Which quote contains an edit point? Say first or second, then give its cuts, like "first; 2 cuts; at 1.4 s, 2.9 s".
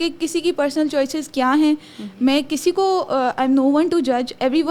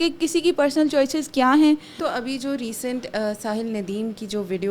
second; 1 cut; at 2.0 s